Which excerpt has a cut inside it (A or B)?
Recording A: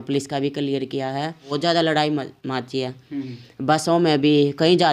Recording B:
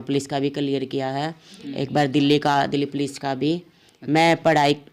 A